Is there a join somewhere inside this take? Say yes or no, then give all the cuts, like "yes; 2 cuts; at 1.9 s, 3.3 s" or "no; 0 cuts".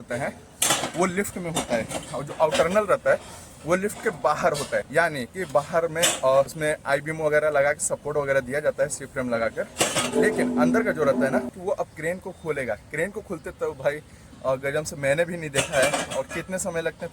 yes; 3 cuts; at 4.9 s, 6.5 s, 11.6 s